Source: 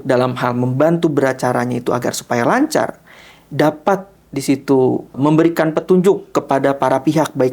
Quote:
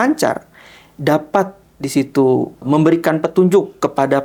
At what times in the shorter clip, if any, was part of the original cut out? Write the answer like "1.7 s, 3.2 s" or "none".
none